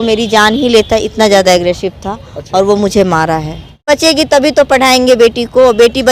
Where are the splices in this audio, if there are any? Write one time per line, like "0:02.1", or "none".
0:03.9